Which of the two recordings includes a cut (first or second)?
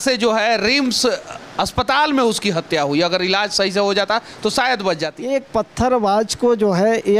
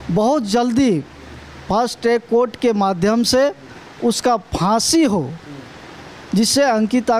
first